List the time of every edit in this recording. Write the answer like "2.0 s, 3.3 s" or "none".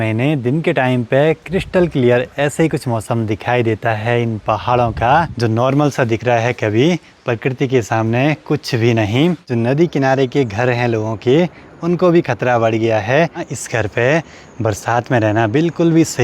5.3 s, 9.5 s, 13.5 s